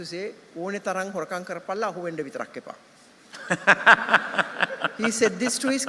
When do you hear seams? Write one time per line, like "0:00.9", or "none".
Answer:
none